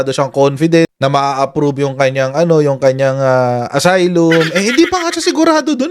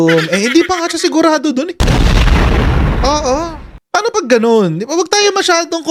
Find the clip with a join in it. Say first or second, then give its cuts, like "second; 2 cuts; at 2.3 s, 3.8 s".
first; 1 cut; at 0.9 s